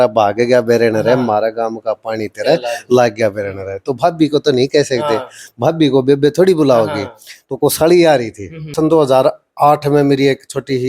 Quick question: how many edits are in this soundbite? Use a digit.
1